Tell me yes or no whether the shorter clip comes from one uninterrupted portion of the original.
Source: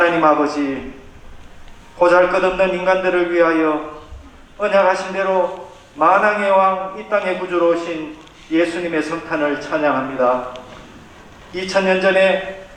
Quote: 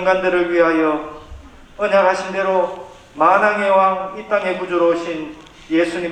yes